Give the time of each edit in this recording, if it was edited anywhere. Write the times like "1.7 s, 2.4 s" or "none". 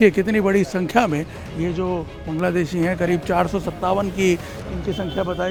none

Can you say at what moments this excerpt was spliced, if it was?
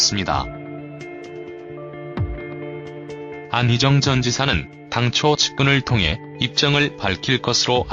1.2 s

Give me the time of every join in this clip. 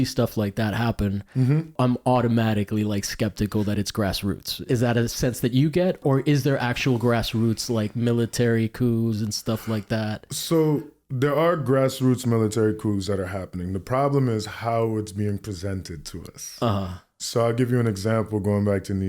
1.7 s, 4.7 s, 6.0 s

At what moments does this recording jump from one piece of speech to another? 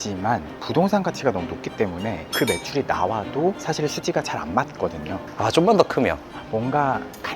5.3 s, 6.3 s

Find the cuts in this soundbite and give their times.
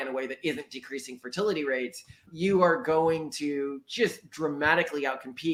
none

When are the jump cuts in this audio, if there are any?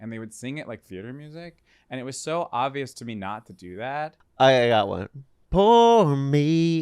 4.2 s

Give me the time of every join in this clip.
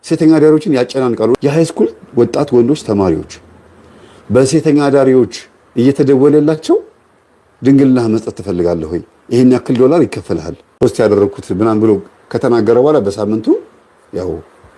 1.4 s, 10.8 s

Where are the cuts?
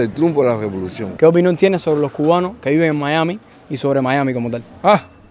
1.1 s

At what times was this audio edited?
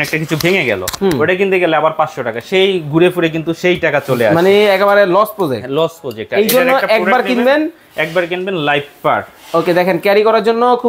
none

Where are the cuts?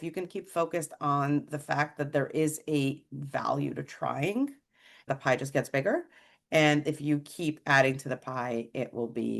5.1 s

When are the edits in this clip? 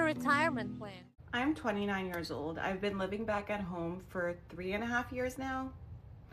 1.1 s

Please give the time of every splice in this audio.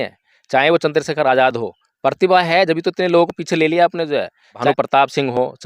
4.6 s

